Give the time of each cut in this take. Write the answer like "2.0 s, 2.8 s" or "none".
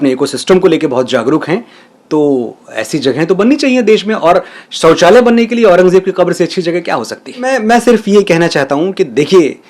none